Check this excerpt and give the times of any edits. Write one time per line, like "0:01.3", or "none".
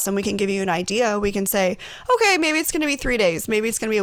none